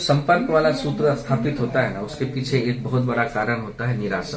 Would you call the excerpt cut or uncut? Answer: uncut